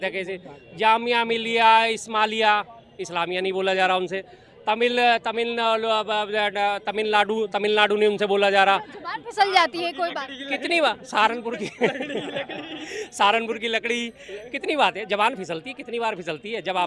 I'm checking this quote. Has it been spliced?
no; 0 cuts

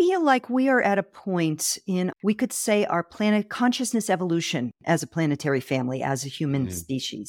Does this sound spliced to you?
no; 0 cuts

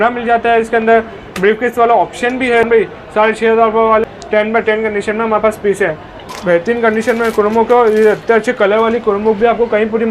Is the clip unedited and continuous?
no; 3 cuts; at 2.6 s, 4.1 s, 6.3 s

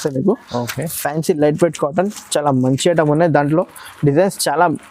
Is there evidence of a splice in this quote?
no; 0 cuts

